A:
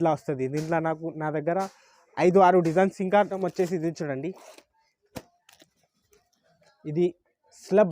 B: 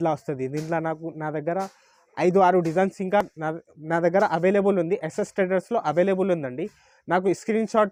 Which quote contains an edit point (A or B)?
A